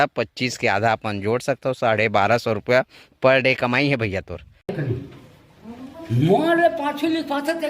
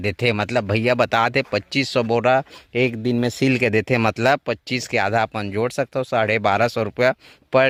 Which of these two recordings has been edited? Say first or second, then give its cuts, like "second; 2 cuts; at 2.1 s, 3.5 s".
first; 1 cut; at 4.7 s